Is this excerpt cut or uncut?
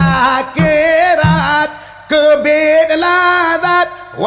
uncut